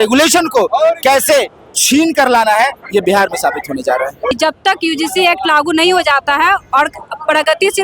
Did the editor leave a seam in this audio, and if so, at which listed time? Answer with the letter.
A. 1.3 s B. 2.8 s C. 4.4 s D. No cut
C